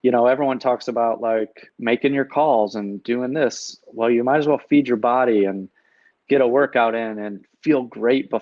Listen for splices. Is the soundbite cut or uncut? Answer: cut